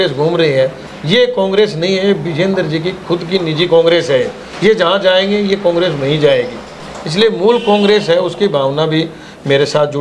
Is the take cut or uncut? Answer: uncut